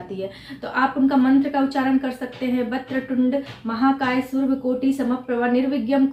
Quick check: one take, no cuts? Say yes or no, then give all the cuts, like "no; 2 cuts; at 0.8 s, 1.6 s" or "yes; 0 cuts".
yes; 0 cuts